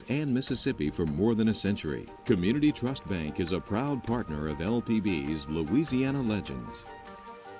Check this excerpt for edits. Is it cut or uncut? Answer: uncut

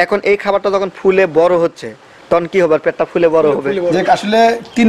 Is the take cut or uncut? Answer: cut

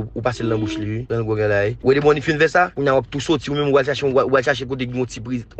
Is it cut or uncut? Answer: cut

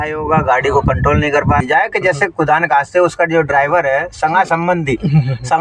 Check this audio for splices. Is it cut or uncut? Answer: cut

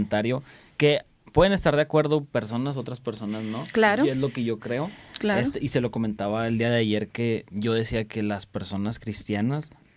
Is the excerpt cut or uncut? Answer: uncut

